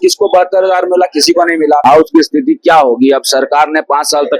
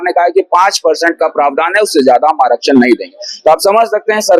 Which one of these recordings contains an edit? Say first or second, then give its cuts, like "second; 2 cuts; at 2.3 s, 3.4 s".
first; 1 cut; at 1.8 s